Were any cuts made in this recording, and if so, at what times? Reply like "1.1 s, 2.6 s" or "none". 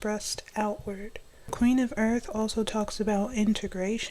1.5 s